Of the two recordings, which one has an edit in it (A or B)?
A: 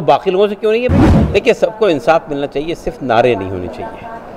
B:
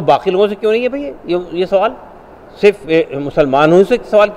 A